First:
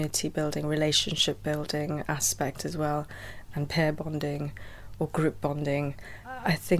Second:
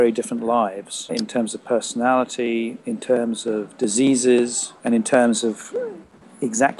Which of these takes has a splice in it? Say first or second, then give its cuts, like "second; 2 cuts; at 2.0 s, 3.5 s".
second; 3 cuts; at 1.1 s, 2.8 s, 4.7 s